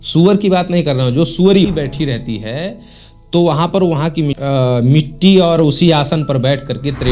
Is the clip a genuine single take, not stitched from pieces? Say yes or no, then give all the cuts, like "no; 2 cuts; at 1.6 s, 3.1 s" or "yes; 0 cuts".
no; 2 cuts; at 1.7 s, 4.4 s